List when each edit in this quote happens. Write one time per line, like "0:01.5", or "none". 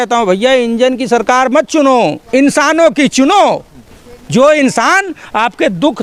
none